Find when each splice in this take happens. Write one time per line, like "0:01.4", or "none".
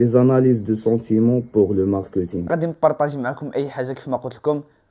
0:02.4